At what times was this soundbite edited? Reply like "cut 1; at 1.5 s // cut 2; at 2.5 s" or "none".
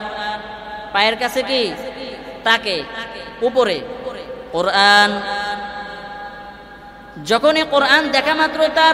none